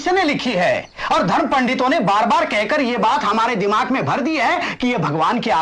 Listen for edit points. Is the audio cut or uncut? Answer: uncut